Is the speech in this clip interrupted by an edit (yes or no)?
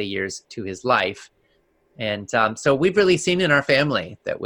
no